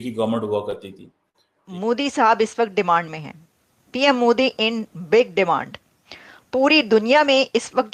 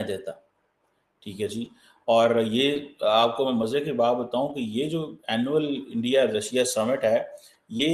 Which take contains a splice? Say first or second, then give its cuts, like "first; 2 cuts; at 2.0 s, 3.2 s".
first; 1 cut; at 1.7 s